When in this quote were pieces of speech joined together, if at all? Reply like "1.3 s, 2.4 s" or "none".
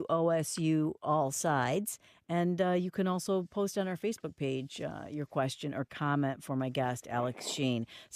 5.8 s